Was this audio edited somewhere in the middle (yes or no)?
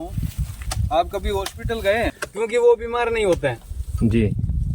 yes